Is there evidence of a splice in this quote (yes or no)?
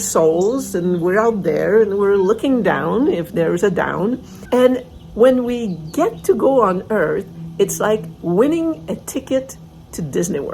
yes